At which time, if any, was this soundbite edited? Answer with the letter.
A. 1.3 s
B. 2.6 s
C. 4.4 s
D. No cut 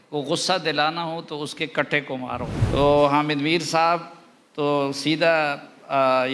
B